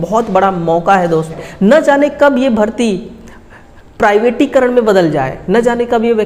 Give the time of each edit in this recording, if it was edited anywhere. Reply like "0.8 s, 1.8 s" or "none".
1.4 s